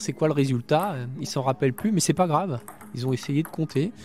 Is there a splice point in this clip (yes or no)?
no